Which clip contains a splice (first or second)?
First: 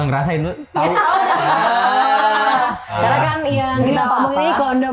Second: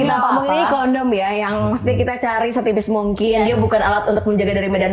first